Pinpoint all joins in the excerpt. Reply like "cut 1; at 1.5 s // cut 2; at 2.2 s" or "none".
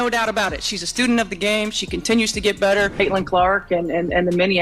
cut 1; at 2.9 s